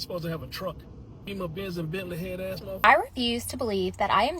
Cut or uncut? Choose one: cut